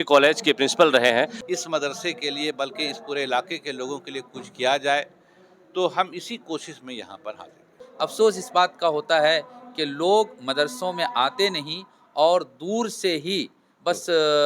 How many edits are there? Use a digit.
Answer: 2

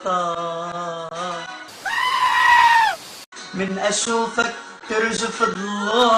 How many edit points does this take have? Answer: 2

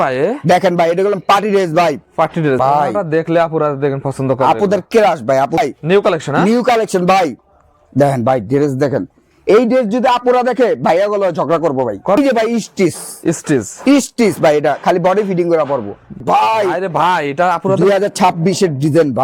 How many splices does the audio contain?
4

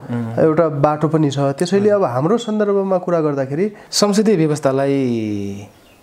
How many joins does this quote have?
1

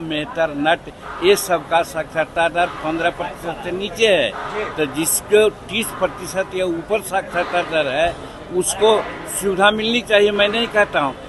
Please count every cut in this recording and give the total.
0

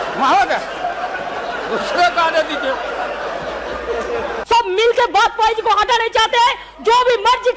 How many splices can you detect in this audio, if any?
1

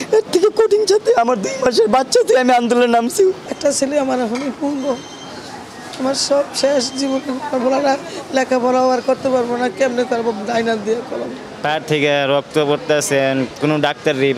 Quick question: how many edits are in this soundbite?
2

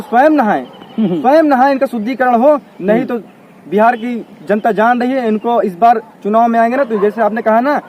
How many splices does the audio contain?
0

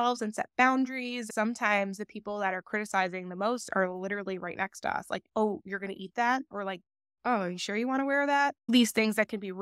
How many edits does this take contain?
4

